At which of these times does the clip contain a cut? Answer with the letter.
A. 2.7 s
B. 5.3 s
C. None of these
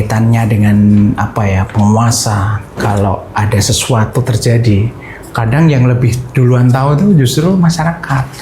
A